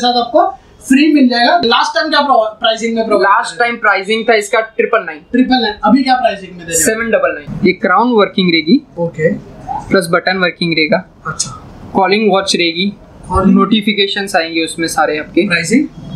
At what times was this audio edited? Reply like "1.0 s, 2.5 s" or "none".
1.6 s, 7.5 s